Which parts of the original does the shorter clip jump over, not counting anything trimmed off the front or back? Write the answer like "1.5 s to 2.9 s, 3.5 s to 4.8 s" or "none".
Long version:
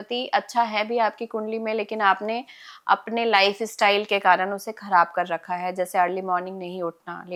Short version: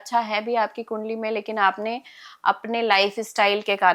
none